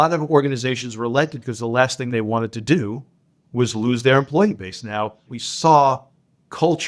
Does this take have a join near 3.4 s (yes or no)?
no